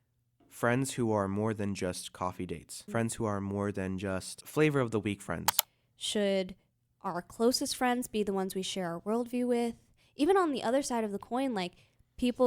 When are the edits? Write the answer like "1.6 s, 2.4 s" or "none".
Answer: 2.7 s, 4.4 s, 5.7 s